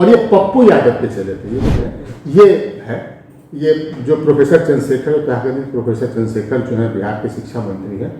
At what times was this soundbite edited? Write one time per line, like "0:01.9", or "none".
0:01.8